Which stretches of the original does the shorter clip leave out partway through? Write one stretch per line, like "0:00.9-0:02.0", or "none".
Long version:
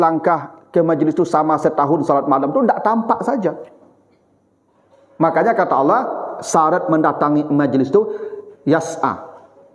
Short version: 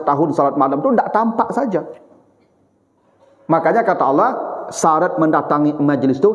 none